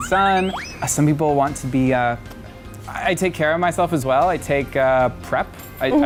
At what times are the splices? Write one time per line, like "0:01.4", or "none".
none